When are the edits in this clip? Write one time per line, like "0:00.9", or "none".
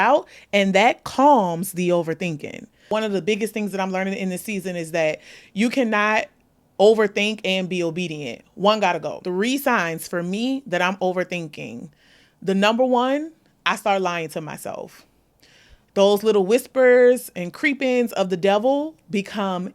0:02.9
0:09.2